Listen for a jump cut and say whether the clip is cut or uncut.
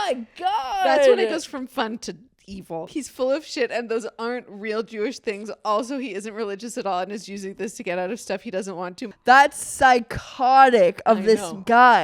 cut